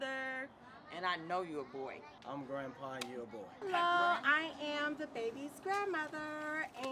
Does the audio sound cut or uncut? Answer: cut